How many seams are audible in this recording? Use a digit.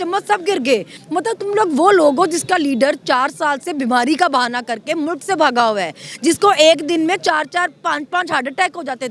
1